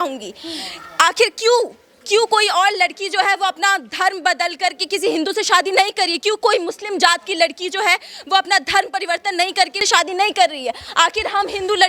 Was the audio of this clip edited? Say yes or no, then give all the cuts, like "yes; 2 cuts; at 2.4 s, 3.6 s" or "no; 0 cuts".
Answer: no; 0 cuts